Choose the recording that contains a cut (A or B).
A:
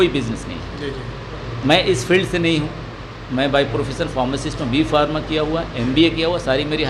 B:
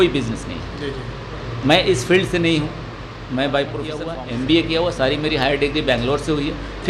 B